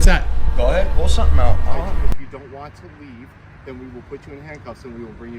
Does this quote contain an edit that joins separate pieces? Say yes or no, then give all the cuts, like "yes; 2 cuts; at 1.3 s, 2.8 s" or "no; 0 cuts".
yes; 1 cut; at 2.1 s